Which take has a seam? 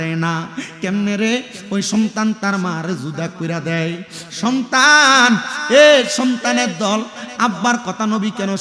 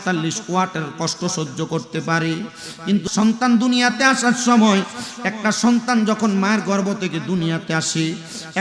second; 1 cut; at 3.1 s

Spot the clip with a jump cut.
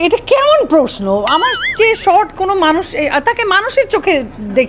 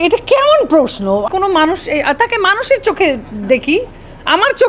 second; 1 cut; at 1.3 s

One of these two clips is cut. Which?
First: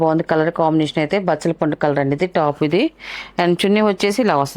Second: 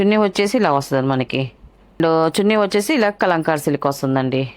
second; 1 cut; at 2.0 s

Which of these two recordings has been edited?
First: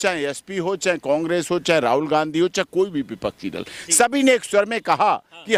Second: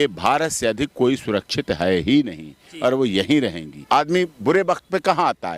second; 1 cut; at 3.7 s

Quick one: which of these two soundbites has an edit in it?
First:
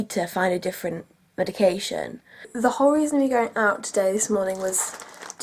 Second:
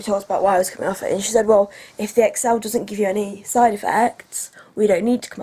first; 1 cut; at 2.5 s

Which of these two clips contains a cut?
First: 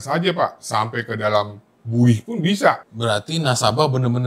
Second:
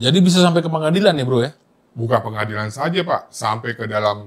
first; 1 cut; at 2.9 s

